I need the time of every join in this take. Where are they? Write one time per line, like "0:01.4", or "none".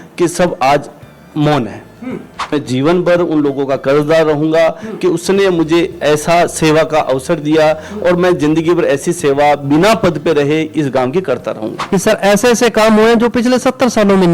0:02.5
0:11.7